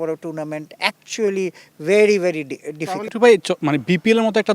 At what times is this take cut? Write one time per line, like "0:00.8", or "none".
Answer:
0:03.1